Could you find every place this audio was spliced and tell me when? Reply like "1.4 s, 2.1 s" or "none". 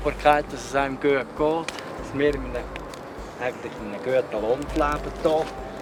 none